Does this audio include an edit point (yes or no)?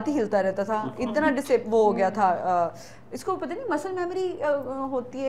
no